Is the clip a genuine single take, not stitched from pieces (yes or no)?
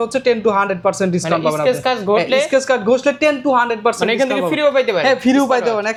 yes